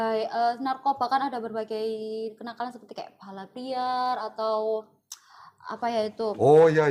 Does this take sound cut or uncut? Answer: uncut